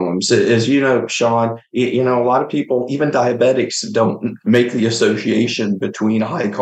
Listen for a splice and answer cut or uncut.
cut